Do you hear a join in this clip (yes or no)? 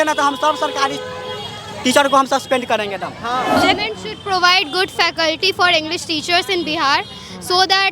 yes